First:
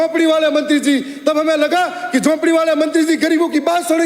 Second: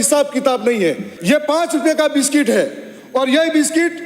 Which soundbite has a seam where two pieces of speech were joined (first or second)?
second